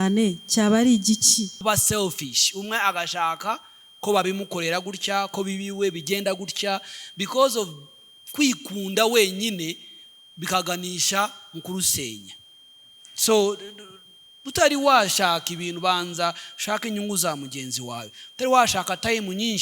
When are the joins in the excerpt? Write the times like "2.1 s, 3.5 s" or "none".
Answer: 1.6 s